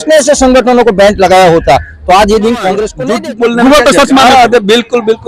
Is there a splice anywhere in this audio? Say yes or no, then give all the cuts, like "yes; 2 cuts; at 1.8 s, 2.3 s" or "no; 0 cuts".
yes; 1 cut; at 3.0 s